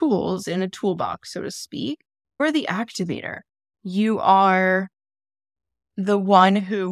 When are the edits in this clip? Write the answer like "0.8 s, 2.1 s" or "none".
2.4 s